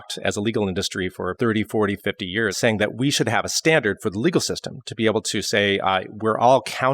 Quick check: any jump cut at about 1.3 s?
yes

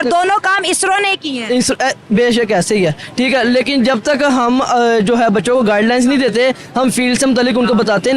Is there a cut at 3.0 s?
no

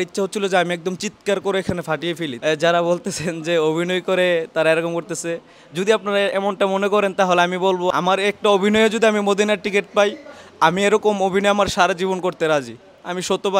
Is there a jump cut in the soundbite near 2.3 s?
yes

